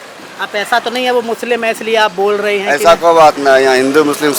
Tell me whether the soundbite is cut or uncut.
uncut